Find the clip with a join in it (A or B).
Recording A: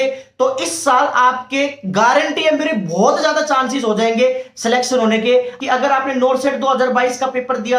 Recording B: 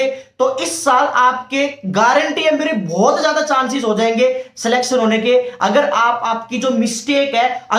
A